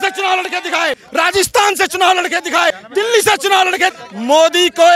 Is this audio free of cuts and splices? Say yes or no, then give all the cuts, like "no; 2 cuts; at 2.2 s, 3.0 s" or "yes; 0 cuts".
no; 3 cuts; at 1.0 s, 2.8 s, 4.0 s